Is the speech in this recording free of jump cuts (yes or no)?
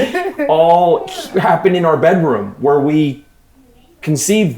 yes